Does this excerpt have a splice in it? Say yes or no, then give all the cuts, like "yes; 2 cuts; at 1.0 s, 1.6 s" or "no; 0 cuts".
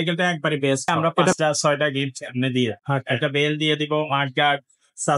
yes; 2 cuts; at 1.4 s, 2.8 s